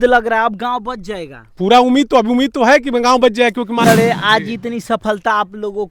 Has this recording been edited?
yes; 1 cut; at 3.9 s

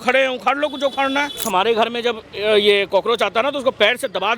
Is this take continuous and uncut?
no; 1 cut; at 1.5 s

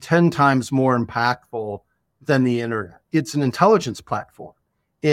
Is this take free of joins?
no; 1 cut; at 2.9 s

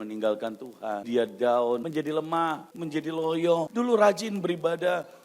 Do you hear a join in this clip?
yes; 4 cuts; at 1.0 s, 1.8 s, 2.7 s, 3.7 s

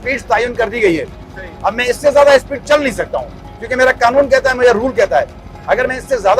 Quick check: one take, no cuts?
yes; 0 cuts

